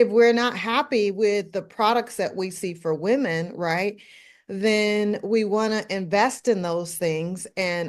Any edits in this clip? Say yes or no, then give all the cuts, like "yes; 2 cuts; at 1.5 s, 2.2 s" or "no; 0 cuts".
no; 0 cuts